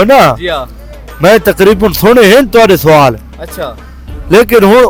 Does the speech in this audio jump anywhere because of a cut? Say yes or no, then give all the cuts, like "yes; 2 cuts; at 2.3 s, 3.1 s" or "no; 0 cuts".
no; 0 cuts